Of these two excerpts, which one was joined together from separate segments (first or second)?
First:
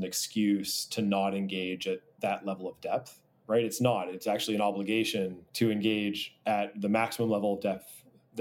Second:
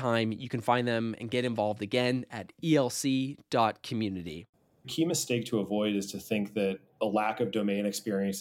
second